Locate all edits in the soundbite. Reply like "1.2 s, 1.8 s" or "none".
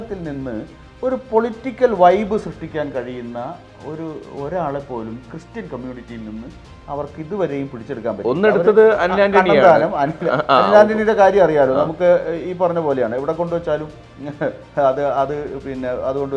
none